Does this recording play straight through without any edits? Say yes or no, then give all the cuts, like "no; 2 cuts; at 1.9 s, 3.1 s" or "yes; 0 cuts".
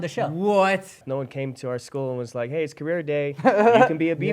no; 1 cut; at 1.0 s